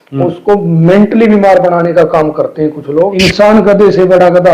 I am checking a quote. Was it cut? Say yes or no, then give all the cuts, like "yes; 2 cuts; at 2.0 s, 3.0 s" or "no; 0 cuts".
yes; 1 cut; at 3.1 s